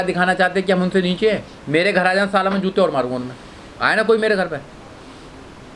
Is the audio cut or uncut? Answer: cut